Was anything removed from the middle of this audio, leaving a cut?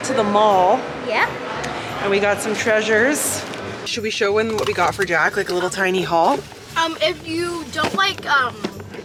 no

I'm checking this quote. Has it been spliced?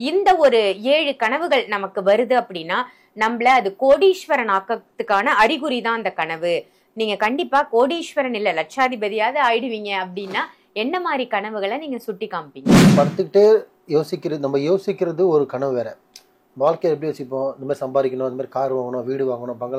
yes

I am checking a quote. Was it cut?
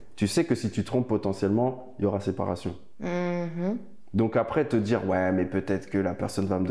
no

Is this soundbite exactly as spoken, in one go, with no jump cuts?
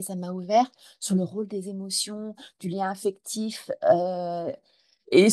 yes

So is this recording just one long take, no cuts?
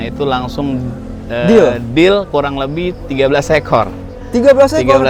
yes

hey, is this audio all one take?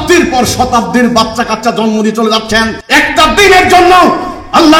no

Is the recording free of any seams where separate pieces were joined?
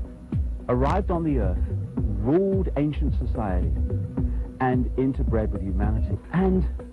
no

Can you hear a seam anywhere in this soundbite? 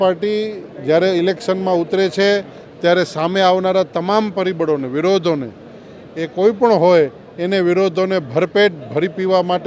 no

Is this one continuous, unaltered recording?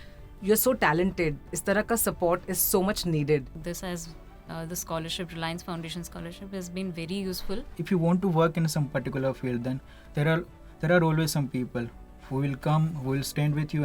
no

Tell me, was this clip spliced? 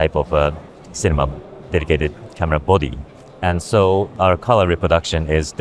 yes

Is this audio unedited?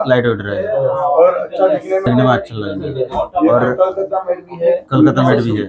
yes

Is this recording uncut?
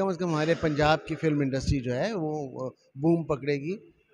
yes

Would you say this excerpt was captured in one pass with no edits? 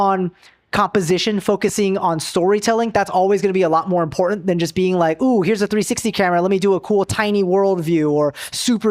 yes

